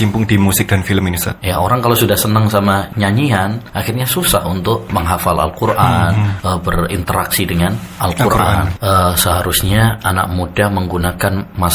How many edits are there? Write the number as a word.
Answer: six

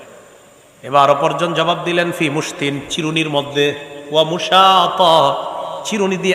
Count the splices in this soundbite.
zero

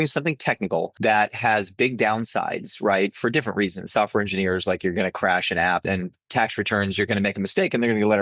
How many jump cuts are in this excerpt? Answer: two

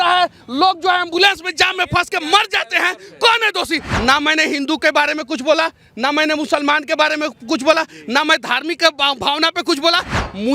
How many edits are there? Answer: one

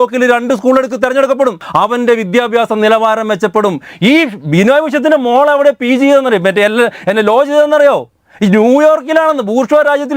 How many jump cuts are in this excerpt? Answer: one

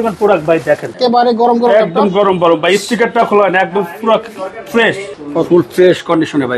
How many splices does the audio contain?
two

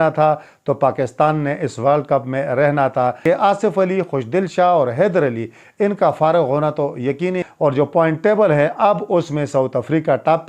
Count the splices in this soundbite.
two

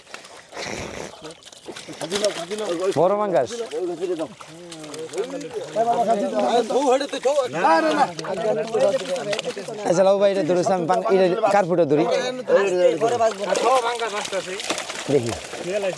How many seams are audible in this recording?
zero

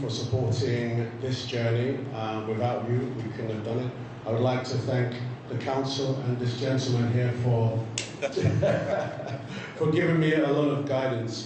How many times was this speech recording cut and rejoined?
zero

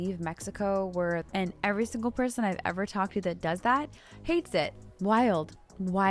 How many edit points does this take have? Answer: two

